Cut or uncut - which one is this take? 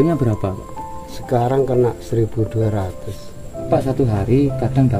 cut